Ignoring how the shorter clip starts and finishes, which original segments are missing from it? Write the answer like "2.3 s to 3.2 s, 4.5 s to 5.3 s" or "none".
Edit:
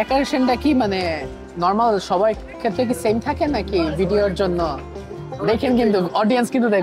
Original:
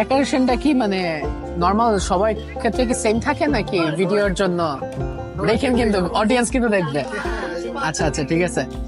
none